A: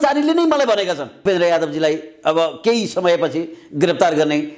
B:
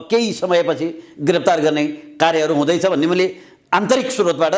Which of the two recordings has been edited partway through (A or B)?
A